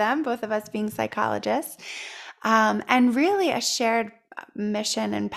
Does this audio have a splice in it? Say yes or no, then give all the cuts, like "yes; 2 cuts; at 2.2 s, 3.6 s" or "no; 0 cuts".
no; 0 cuts